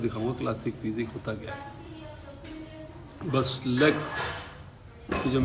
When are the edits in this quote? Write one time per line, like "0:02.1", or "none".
none